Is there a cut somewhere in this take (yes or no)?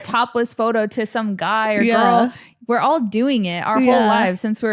no